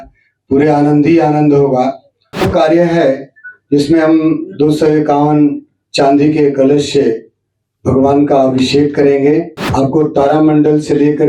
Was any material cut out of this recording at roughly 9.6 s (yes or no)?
yes